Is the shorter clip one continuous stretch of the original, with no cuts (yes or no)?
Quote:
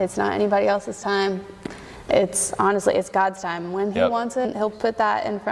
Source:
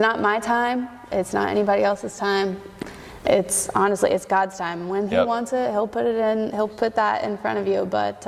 no